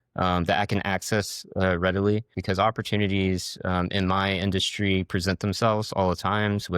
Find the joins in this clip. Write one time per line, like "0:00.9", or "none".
0:02.4